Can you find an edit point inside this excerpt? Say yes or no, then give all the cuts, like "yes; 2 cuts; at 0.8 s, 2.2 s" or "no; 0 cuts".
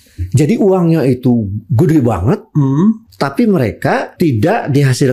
yes; 2 cuts; at 3.1 s, 4.1 s